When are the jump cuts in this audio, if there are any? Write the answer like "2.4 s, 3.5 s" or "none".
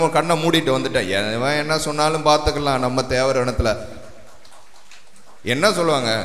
none